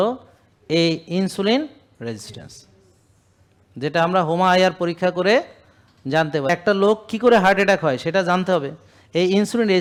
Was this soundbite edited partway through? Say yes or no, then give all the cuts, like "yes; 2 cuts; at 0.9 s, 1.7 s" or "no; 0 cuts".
no; 0 cuts